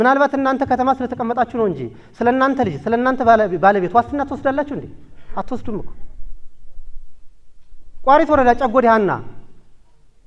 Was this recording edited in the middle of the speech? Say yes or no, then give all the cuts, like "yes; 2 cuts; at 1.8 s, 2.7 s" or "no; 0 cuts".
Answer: no; 0 cuts